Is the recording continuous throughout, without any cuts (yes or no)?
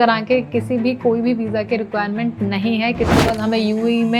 no